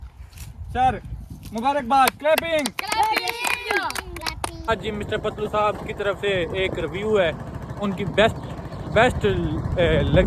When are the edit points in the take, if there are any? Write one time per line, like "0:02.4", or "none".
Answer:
0:04.7